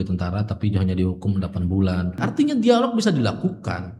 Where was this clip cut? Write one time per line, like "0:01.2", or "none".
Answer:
0:02.2